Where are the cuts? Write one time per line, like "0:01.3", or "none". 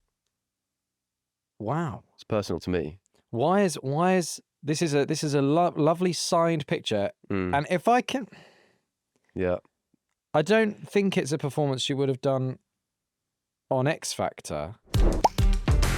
0:14.8